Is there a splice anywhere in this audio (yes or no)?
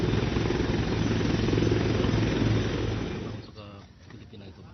no